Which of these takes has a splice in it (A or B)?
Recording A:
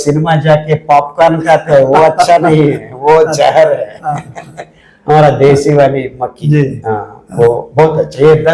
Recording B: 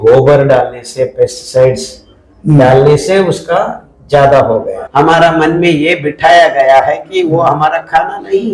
B